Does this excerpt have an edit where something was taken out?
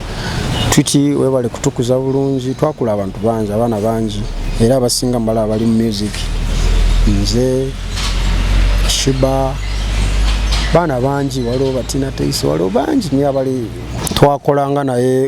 yes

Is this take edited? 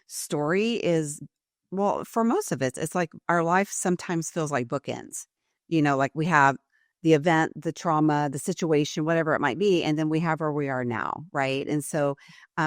no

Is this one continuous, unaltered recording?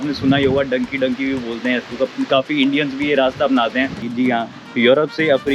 no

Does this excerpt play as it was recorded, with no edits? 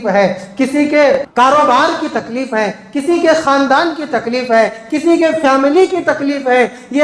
no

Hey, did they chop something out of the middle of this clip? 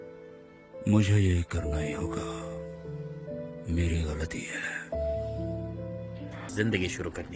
yes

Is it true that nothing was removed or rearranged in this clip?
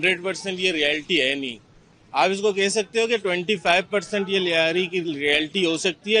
yes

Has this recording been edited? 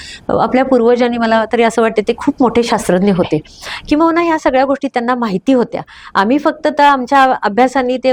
no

